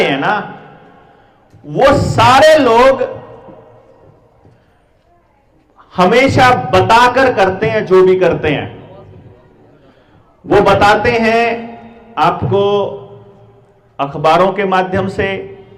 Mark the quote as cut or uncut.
uncut